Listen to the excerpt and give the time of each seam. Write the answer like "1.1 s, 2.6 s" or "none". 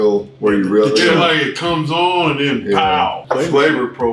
3.2 s